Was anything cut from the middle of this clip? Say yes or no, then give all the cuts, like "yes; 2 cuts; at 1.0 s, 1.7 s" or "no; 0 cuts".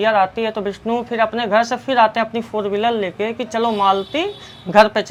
no; 0 cuts